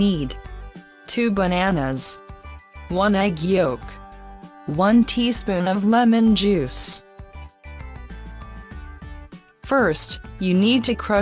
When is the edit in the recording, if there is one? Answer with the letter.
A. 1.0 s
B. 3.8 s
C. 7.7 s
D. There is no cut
A